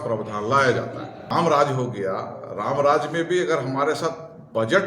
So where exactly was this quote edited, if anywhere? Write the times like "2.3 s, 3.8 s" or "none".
1.3 s

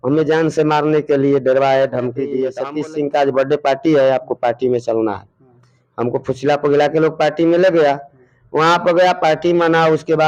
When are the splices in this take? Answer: 2.6 s

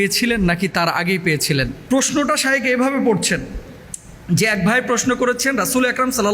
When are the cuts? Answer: 1.8 s

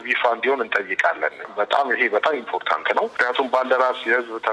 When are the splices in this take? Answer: none

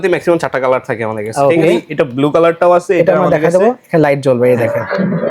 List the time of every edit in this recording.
1.8 s

